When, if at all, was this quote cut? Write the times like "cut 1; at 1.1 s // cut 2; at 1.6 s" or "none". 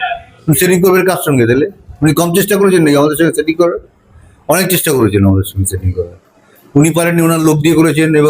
none